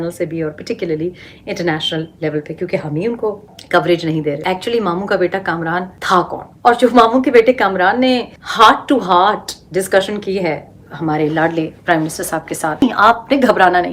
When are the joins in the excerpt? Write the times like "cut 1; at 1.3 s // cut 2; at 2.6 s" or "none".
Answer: cut 1; at 4.4 s // cut 2; at 12.8 s